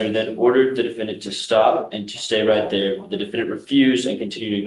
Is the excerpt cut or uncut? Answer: uncut